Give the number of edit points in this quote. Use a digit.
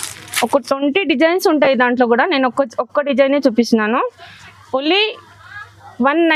0